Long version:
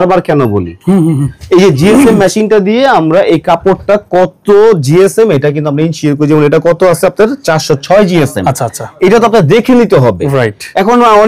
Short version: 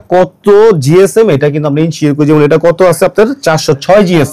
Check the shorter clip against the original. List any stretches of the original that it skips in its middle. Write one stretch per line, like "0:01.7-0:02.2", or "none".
none